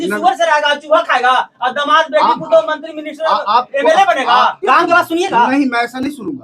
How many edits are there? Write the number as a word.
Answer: one